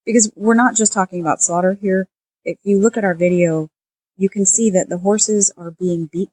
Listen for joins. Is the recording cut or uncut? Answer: uncut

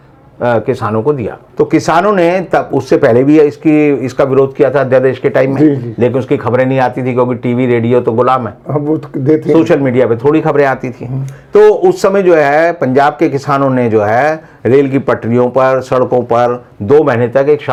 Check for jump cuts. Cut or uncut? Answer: uncut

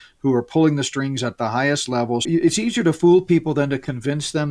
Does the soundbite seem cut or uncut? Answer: cut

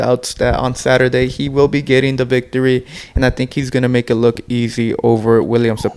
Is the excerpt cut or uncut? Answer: uncut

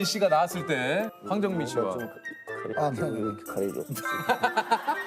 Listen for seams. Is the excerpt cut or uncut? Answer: cut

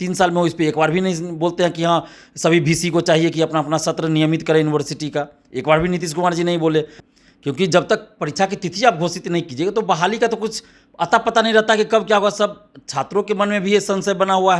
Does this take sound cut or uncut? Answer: cut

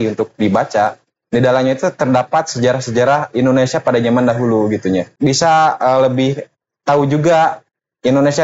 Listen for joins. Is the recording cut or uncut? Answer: cut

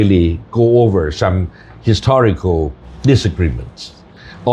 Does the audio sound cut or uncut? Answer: cut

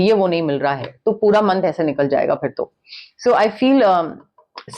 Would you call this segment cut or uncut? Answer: uncut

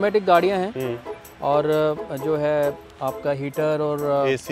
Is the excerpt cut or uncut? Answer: uncut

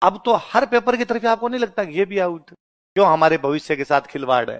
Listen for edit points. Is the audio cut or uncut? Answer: cut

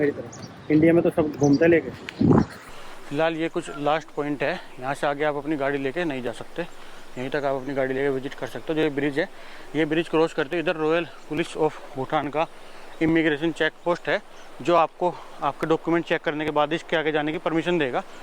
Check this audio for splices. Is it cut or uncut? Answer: cut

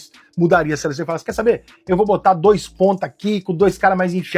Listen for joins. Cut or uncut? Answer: uncut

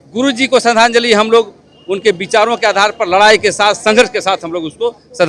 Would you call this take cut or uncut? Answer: uncut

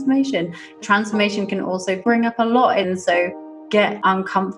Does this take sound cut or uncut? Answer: cut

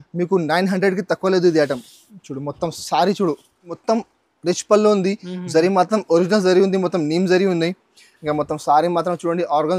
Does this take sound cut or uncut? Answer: cut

